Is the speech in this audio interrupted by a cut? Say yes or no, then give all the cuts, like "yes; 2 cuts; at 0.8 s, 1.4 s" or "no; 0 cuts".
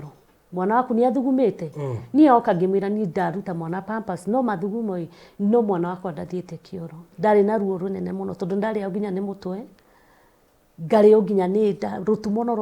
yes; 1 cut; at 7.1 s